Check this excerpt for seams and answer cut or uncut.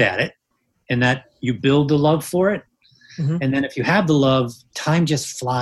cut